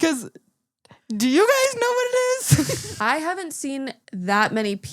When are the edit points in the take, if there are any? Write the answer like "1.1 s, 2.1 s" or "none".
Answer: 2.9 s